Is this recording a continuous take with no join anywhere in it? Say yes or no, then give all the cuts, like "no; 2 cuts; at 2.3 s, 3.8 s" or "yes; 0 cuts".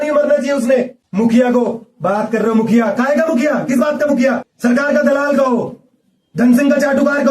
no; 2 cuts; at 1.0 s, 4.5 s